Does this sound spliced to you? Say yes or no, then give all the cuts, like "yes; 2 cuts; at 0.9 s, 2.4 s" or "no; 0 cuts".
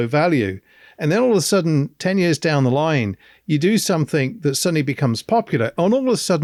no; 0 cuts